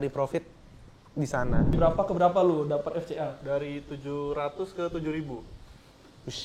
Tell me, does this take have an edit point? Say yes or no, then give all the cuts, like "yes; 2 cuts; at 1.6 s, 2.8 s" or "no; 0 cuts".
yes; 1 cut; at 1.8 s